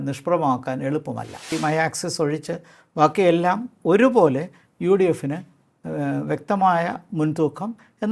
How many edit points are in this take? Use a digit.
1